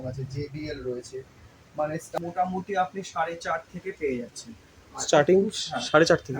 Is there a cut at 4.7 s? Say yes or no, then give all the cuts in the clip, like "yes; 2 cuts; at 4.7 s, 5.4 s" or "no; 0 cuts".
no; 1 cut; at 2.2 s